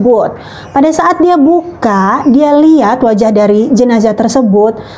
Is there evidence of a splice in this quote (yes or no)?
no